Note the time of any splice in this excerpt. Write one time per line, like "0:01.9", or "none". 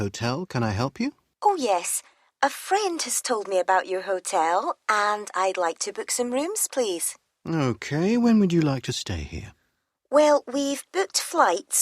0:01.3